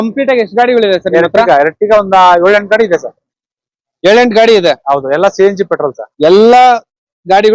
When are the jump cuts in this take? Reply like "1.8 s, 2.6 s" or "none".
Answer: none